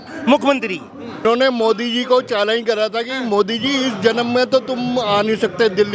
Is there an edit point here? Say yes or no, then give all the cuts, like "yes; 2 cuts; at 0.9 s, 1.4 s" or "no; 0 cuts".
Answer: yes; 1 cut; at 1.2 s